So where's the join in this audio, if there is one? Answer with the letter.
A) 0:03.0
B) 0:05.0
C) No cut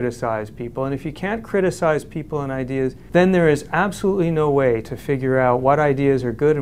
A